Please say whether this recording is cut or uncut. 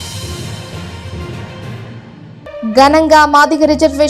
cut